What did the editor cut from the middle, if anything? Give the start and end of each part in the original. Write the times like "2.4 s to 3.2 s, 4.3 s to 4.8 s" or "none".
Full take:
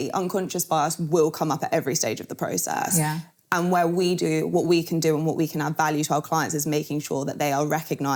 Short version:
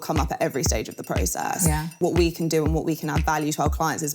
3.3 s to 4.5 s